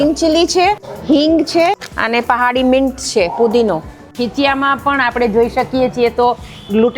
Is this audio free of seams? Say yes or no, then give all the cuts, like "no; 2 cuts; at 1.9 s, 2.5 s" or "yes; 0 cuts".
no; 3 cuts; at 0.9 s, 1.9 s, 4.1 s